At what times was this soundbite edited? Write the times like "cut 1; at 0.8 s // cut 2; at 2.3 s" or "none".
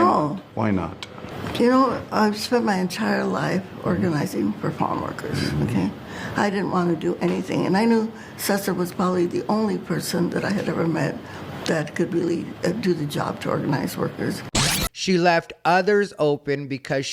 cut 1; at 14.7 s